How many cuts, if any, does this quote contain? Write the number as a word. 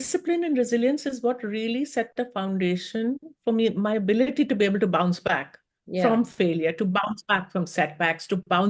zero